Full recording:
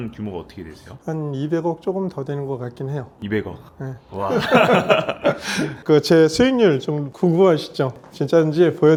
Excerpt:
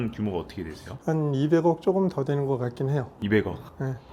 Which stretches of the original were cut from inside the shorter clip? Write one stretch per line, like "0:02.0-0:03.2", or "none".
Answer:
none